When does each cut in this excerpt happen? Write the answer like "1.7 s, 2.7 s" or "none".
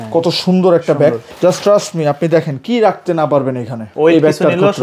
1.3 s, 3.9 s